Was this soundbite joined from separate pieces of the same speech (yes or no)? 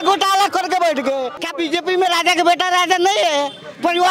yes